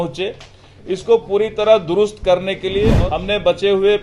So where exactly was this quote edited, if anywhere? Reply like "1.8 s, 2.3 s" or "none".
2.9 s